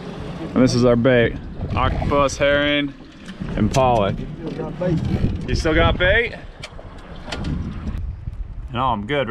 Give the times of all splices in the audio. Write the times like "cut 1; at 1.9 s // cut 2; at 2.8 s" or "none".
cut 1; at 8.0 s